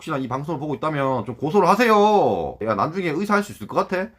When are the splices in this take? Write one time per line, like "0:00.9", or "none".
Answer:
0:02.6